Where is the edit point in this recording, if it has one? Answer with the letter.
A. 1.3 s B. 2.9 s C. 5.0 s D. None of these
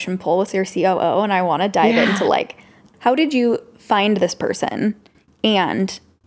B